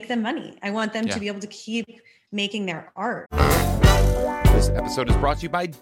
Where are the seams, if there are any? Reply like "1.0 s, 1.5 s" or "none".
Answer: 3.3 s